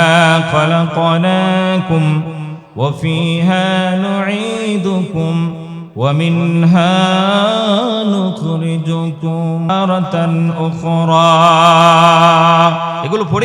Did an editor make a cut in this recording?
yes; 1 cut; at 9.7 s

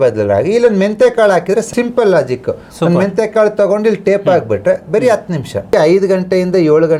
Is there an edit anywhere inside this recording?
yes; 2 cuts; at 1.7 s, 5.7 s

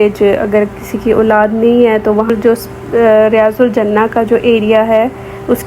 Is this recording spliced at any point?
yes; 1 cut; at 2.3 s

